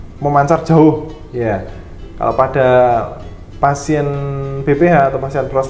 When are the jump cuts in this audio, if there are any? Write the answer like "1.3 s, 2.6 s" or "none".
none